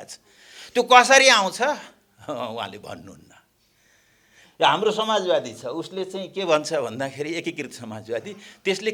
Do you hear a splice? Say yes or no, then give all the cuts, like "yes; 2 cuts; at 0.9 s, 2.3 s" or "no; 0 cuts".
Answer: no; 0 cuts